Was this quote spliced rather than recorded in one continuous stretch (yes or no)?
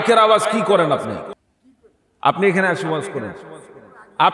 no